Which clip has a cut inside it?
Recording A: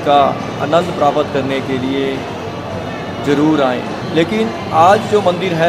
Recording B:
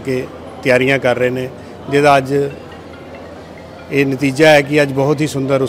A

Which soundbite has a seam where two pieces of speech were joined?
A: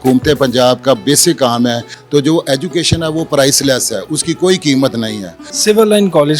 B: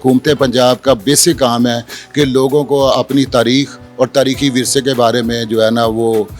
A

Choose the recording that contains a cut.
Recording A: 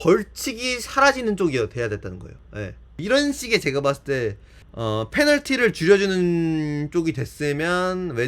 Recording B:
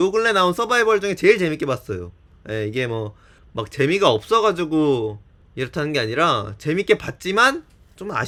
A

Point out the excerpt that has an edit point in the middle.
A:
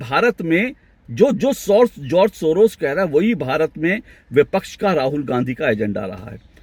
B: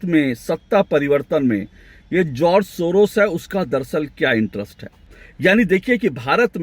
B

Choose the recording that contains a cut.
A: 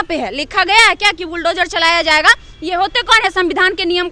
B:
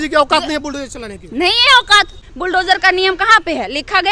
B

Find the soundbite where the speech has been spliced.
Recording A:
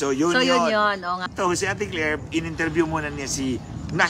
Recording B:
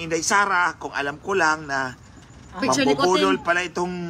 A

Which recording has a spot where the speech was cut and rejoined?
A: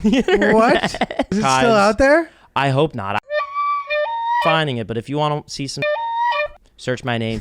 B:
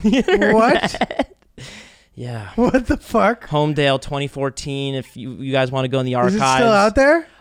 A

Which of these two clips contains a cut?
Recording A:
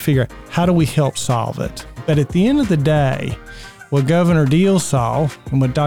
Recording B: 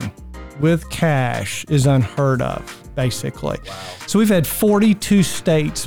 A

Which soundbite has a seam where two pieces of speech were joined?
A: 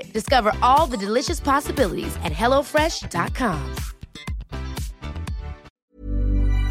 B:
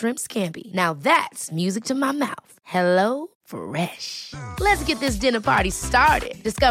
A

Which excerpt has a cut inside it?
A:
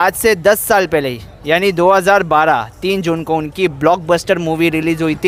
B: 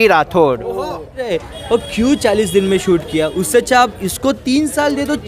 B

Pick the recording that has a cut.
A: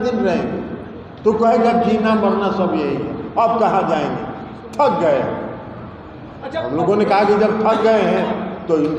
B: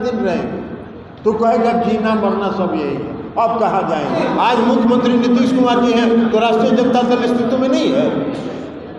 B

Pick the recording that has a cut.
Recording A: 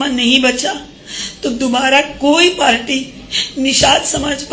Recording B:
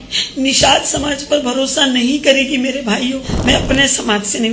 B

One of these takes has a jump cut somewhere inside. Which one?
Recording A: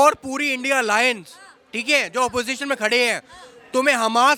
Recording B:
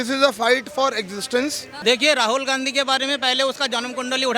B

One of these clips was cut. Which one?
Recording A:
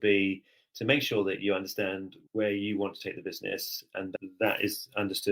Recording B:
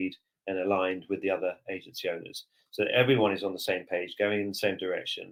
A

